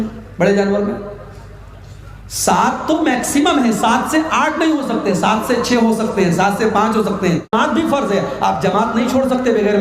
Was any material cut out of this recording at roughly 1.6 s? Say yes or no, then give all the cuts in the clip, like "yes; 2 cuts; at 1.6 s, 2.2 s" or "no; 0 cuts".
no; 1 cut; at 7.5 s